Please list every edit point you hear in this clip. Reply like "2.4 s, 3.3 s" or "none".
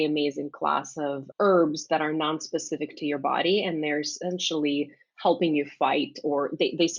1.3 s